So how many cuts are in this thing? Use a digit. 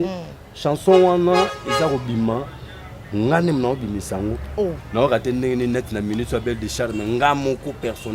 1